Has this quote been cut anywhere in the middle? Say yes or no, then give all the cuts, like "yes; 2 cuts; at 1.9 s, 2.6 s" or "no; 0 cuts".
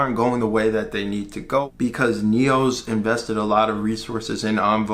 yes; 1 cut; at 1.6 s